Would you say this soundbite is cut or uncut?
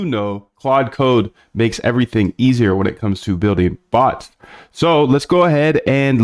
cut